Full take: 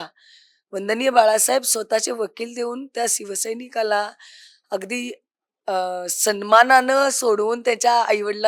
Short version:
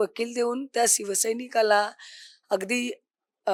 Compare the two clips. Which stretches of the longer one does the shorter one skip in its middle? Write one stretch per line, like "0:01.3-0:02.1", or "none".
none